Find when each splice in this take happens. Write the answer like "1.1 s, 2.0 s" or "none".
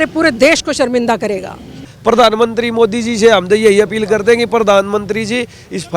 1.9 s